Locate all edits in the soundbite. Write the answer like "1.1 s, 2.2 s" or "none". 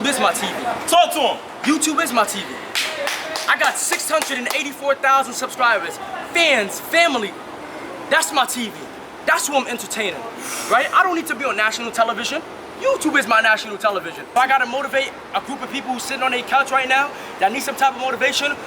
14.3 s